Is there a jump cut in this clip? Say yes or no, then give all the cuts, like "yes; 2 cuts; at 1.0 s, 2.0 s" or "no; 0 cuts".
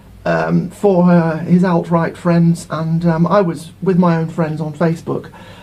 no; 0 cuts